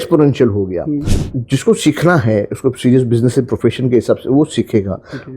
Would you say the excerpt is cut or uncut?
cut